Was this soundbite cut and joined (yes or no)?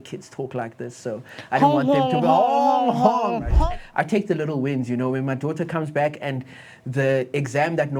yes